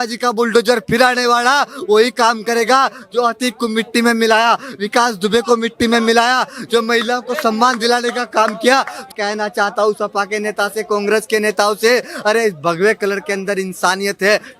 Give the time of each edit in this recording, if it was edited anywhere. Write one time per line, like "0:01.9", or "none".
0:09.1